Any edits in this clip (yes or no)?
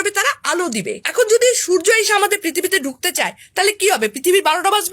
yes